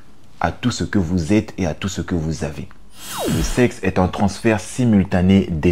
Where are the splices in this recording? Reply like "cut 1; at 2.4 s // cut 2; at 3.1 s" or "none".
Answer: cut 1; at 3.3 s